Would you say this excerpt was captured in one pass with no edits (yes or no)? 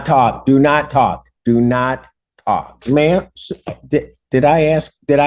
no